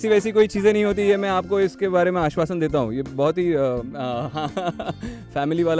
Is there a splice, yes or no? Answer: no